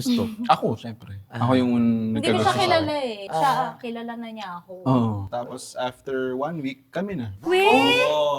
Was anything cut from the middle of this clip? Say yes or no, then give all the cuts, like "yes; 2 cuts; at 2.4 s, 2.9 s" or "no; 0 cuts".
yes; 2 cuts; at 3.2 s, 5.3 s